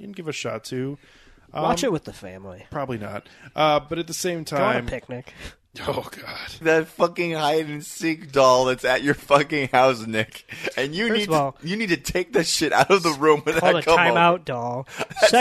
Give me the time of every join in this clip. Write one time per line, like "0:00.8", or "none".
0:06.6

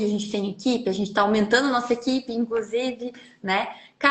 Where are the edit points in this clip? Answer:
none

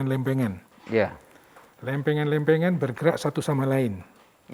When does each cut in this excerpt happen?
none

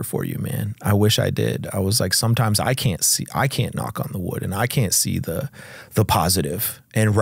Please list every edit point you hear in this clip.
none

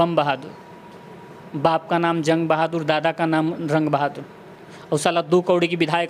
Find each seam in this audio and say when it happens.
none

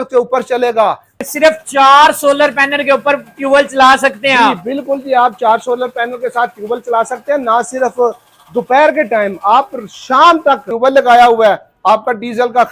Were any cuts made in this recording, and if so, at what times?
0:01.1
0:10.7

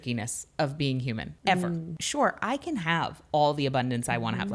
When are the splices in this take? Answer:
0:01.3
0:02.0

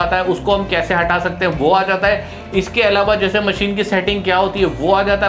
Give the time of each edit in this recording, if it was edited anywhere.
none

